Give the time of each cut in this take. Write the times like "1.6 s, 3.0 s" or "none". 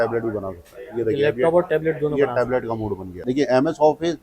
3.2 s